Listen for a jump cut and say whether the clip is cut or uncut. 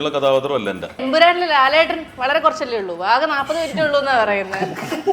cut